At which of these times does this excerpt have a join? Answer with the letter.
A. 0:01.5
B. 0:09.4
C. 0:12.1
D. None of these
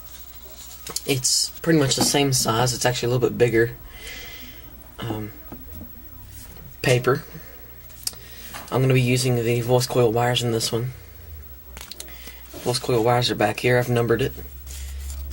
A